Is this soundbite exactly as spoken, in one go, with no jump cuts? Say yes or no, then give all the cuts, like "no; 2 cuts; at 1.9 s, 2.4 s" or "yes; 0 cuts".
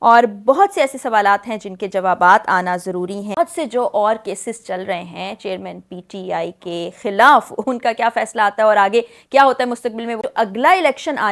no; 2 cuts; at 3.3 s, 10.2 s